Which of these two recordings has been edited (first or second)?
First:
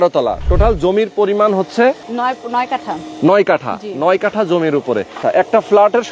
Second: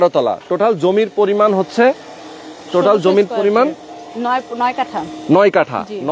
first